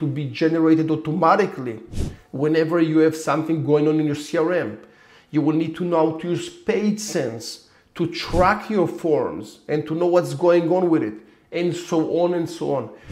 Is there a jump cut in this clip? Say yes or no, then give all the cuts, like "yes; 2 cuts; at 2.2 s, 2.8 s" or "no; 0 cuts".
no; 0 cuts